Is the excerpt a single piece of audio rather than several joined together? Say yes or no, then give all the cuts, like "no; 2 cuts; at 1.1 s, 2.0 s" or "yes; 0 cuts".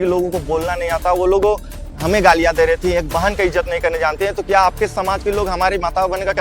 yes; 0 cuts